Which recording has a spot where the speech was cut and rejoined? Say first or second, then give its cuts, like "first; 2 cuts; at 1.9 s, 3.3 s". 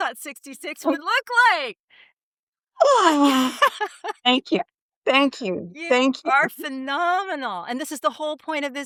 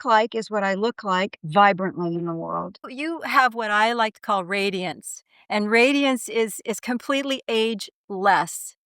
second; 1 cut; at 2.9 s